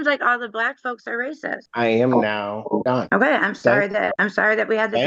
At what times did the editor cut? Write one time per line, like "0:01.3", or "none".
0:01.7
0:03.0
0:04.2